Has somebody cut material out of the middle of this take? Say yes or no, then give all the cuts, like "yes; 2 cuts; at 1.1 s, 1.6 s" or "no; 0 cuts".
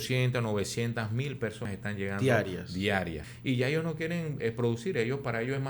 yes; 2 cuts; at 1.7 s, 3.3 s